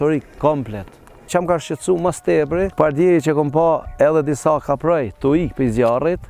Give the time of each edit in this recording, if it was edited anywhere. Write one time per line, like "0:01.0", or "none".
0:01.3
0:02.7